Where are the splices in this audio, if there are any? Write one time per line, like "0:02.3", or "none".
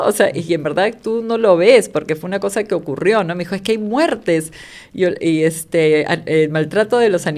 none